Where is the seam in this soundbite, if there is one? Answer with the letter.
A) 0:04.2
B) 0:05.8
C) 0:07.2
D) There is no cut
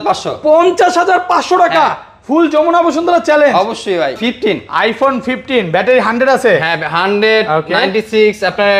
A